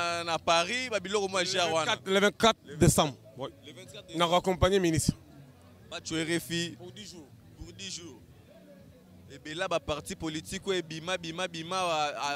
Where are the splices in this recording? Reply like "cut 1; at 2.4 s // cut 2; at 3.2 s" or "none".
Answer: none